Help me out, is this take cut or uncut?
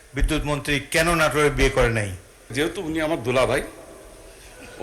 cut